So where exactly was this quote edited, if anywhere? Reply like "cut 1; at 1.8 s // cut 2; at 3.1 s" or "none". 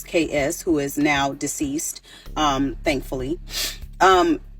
cut 1; at 3.6 s